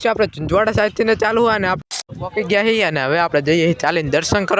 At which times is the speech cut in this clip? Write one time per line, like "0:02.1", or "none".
0:01.8